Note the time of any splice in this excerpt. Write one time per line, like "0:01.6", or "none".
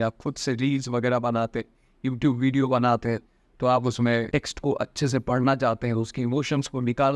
0:04.3

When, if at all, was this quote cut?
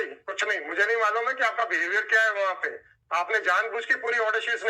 none

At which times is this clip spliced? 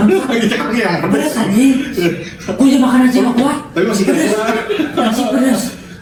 none

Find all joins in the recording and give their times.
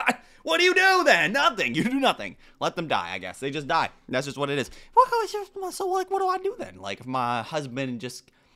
0:04.8

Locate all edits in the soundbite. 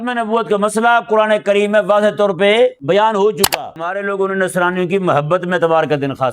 0:02.8
0:03.9

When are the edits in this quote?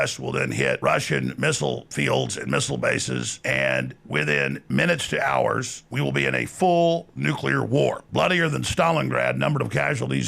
0:00.8
0:01.9
0:03.3
0:04.0
0:05.8
0:08.0

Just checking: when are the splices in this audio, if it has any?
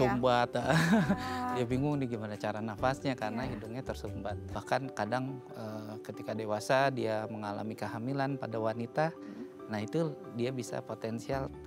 0:04.5

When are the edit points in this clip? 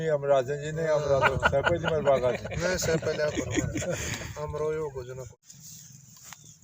0:05.3

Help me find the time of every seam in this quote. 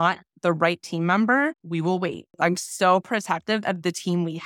0:02.0

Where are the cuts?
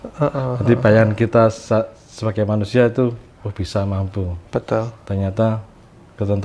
none

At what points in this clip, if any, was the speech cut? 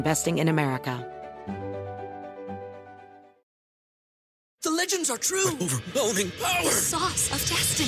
0:01.0

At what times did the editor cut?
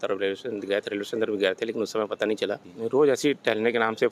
0:02.7

